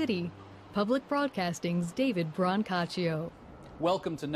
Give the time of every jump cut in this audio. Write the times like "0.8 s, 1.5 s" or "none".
none